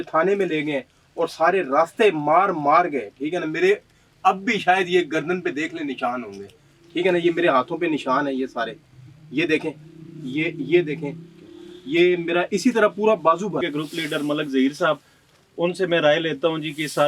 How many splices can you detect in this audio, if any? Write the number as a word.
one